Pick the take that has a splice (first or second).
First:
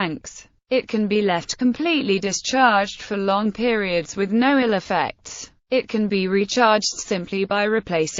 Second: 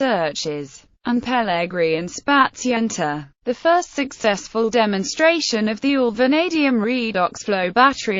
second